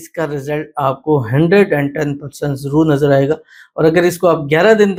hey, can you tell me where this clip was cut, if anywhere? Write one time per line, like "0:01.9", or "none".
none

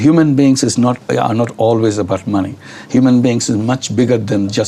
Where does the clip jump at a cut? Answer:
none

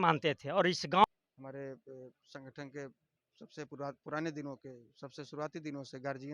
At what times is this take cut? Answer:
0:01.0

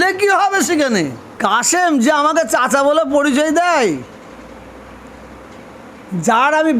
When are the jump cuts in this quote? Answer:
0:01.2

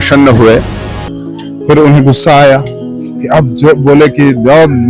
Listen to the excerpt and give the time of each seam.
0:00.9

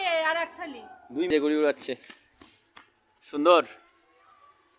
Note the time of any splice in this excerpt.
0:01.3

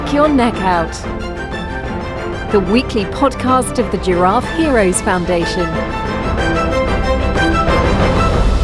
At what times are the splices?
none

